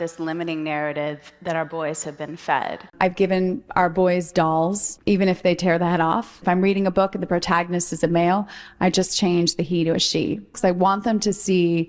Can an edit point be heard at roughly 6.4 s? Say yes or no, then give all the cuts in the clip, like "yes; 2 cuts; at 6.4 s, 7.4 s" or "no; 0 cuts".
yes; 3 cuts; at 2.8 s, 4.9 s, 6.4 s